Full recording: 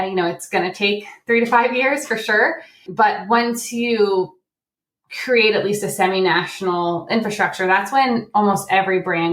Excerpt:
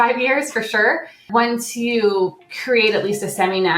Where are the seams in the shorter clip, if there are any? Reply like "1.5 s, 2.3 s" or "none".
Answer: 1.2 s, 2.5 s